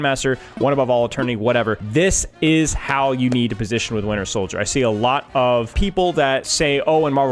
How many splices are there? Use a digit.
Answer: 2